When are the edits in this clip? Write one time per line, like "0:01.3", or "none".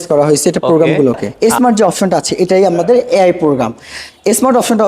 0:01.3